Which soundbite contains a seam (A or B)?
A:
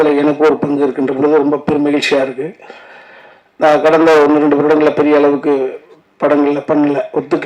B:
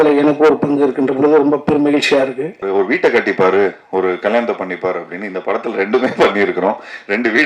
B